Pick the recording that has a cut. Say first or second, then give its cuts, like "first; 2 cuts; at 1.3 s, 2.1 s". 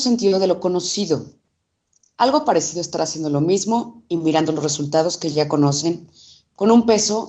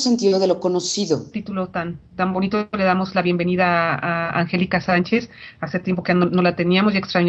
first; 1 cut; at 1.3 s